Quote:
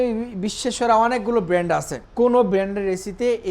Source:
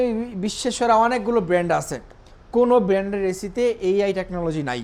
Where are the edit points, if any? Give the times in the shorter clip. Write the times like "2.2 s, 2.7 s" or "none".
2.0 s